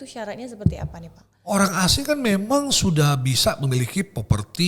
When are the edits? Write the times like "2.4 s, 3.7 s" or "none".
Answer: none